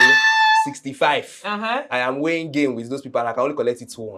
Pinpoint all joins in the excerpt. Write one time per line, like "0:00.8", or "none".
none